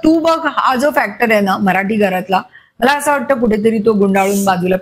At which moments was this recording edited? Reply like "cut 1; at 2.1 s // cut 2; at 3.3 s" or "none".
none